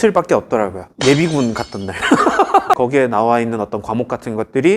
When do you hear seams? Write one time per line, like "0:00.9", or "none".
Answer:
0:02.8